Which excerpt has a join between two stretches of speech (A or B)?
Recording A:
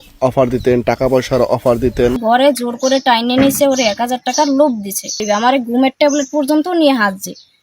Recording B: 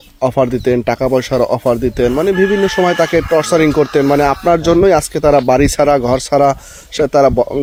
A